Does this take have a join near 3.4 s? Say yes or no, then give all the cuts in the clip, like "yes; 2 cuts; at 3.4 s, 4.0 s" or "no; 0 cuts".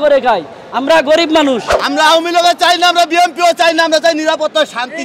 no; 1 cut; at 1.7 s